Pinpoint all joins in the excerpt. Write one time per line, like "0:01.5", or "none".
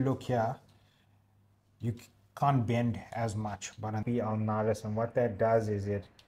0:04.0